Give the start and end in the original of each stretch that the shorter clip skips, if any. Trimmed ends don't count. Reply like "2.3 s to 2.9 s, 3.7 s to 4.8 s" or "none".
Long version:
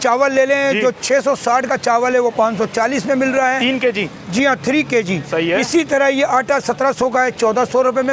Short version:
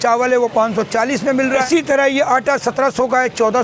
3.5 s to 5.7 s